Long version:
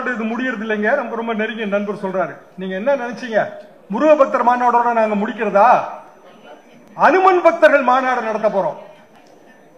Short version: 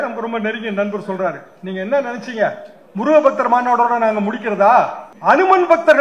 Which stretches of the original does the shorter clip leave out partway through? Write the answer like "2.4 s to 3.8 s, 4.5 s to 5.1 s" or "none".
6.0 s to 6.8 s